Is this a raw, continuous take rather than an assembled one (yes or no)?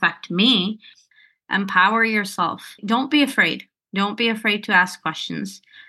no